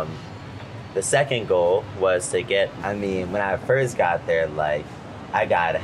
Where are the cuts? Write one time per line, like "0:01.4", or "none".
0:02.8